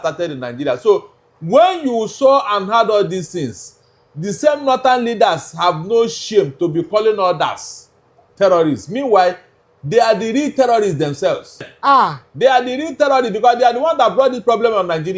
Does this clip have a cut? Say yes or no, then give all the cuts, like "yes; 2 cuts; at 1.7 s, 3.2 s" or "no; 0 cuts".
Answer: yes; 1 cut; at 11.7 s